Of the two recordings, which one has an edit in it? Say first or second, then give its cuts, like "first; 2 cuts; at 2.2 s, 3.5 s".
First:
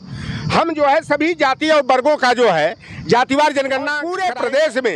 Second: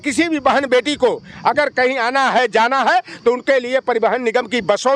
first; 1 cut; at 4.0 s